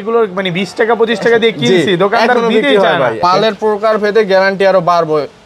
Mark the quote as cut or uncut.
cut